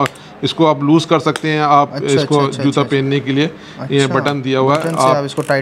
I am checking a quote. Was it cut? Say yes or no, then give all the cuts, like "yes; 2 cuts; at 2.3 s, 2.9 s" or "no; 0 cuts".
no; 0 cuts